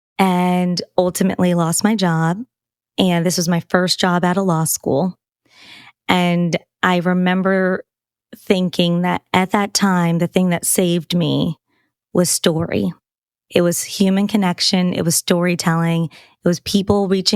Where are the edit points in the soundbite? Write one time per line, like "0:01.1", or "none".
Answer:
none

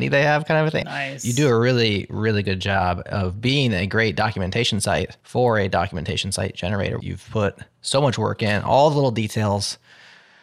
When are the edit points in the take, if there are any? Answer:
0:00.8
0:05.2
0:07.0

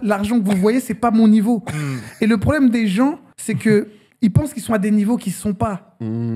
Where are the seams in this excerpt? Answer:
0:03.3
0:04.0

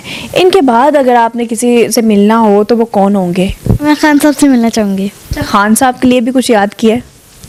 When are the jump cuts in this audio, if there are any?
none

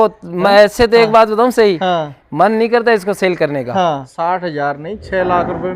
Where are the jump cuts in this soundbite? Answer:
0:04.1

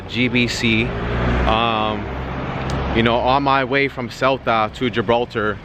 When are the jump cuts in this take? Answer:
none

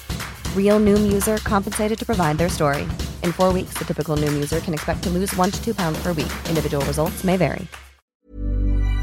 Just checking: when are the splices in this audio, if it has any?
0:08.0

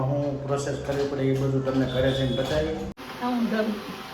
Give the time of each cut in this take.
0:02.9

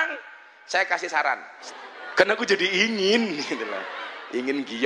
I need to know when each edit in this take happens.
0:01.5

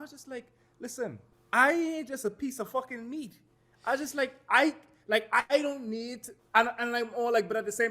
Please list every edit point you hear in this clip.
0:01.3

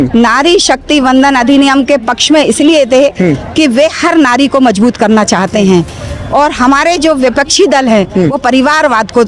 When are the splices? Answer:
none

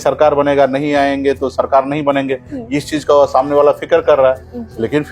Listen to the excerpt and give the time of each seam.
none

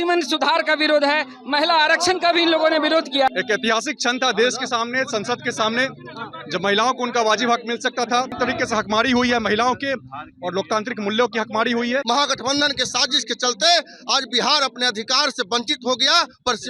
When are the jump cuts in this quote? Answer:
0:03.3
0:08.3
0:12.0

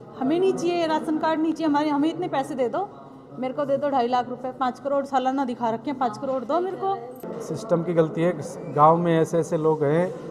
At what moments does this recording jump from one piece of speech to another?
0:07.4

